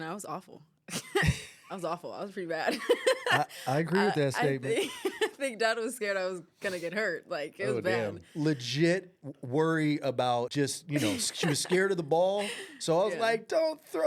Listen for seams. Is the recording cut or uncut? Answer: cut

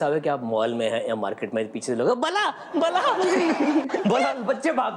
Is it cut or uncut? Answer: uncut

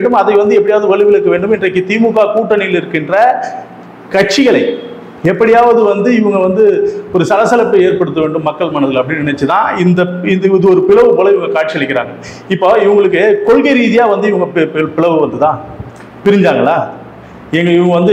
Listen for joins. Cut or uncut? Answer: uncut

